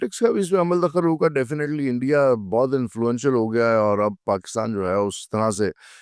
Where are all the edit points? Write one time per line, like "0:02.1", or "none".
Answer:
none